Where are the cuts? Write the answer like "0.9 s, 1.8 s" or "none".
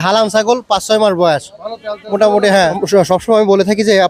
2.8 s